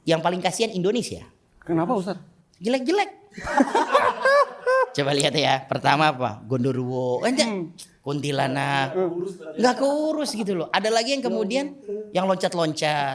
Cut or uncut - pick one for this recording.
uncut